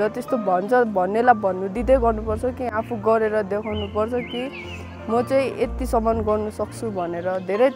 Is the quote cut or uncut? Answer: uncut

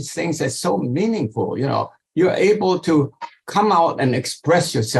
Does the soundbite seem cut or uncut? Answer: cut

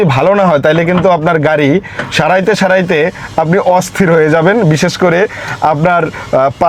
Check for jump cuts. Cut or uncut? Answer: uncut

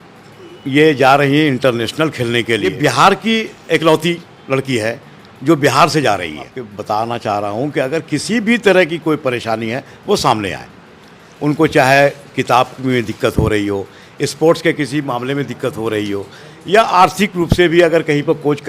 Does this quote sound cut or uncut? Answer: cut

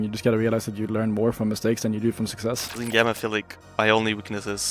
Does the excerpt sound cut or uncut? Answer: cut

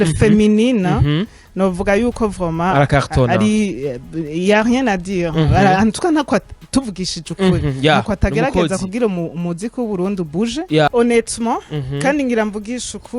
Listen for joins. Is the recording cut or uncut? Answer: cut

